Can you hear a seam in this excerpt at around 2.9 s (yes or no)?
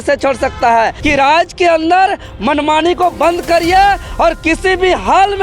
no